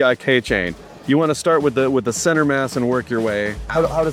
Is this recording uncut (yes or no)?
yes